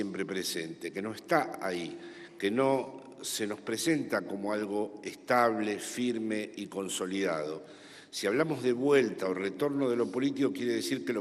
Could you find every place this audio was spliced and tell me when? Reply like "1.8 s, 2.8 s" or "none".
4.1 s